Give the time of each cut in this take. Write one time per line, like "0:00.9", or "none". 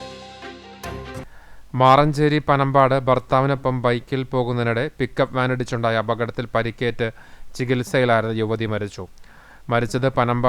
0:01.2